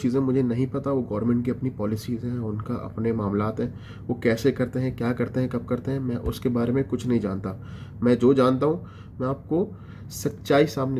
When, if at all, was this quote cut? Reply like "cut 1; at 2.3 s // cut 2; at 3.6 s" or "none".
none